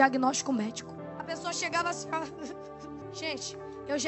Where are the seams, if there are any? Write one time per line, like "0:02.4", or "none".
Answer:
0:01.0
0:03.0

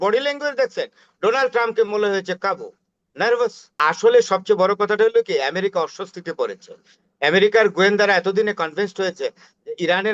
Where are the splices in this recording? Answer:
0:03.8

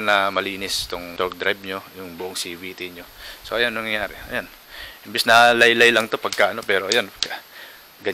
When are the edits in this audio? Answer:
0:01.1

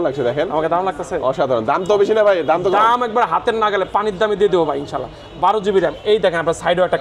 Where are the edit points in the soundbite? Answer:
none

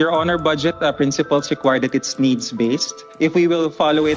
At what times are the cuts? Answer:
0:03.0

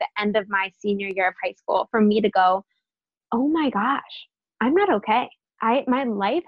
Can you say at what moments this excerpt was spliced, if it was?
0:05.4

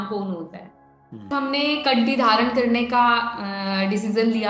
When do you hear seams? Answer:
0:01.3

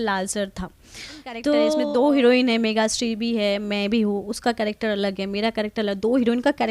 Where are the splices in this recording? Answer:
0:01.6

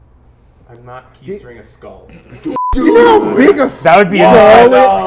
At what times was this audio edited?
0:02.6

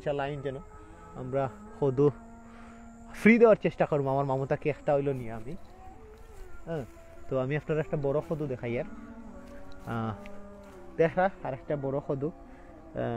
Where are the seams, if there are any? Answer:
none

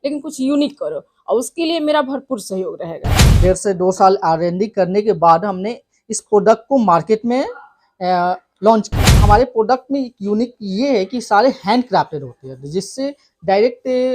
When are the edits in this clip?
0:03.2
0:09.1

